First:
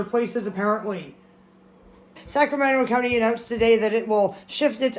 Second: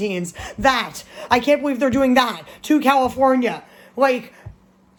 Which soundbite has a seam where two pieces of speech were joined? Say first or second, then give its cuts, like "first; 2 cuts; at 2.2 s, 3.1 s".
first; 1 cut; at 2.2 s